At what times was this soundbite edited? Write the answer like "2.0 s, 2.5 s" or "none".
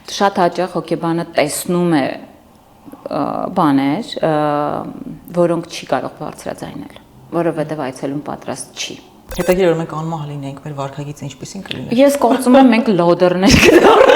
9.2 s